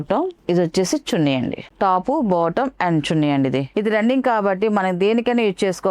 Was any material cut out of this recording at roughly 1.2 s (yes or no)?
no